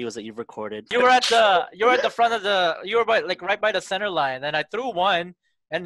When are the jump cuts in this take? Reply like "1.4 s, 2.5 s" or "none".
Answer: 0.9 s